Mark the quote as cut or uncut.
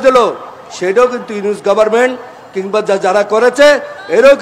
uncut